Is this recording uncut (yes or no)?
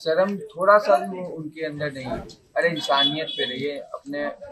no